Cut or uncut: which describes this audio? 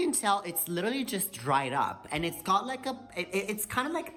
uncut